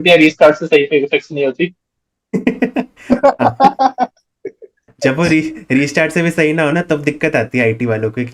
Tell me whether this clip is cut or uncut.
uncut